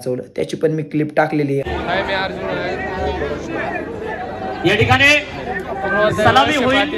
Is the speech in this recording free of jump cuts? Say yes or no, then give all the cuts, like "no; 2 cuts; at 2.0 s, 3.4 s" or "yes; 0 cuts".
no; 1 cut; at 1.7 s